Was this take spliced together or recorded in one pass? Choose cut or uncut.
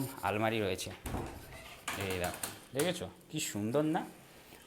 uncut